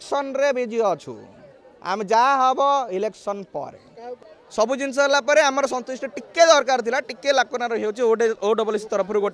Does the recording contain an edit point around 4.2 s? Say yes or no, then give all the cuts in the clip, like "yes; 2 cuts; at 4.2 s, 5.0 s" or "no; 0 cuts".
yes; 1 cut; at 4.2 s